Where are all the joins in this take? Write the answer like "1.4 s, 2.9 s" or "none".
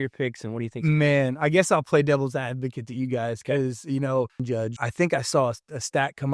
4.6 s

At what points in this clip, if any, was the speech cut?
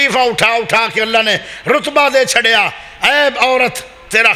none

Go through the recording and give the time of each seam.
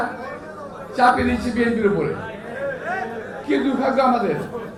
none

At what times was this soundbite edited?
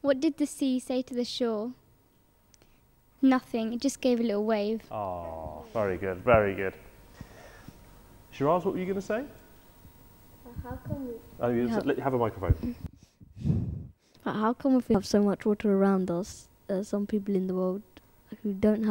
none

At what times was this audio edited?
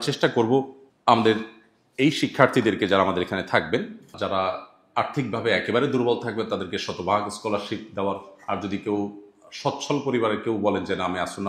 none

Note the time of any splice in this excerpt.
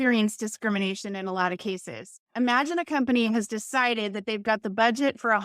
2.3 s

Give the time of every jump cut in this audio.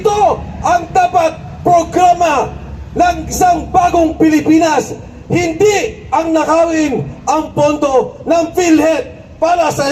none

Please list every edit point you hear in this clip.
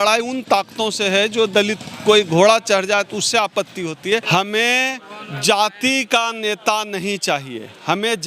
4.2 s

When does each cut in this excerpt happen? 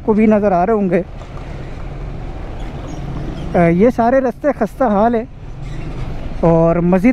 none

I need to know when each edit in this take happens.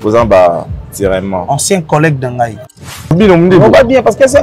2.7 s

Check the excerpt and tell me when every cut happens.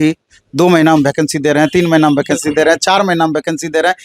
none

